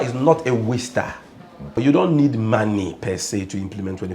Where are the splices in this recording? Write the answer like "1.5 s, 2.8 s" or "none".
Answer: 1.8 s